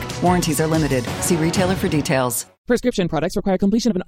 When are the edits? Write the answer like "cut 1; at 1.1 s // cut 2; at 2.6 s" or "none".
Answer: cut 1; at 2.6 s